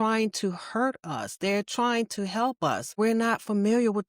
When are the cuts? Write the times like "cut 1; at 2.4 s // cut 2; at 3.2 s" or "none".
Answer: cut 1; at 3.0 s